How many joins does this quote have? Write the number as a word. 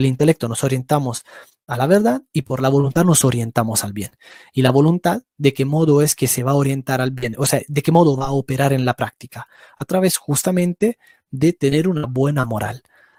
zero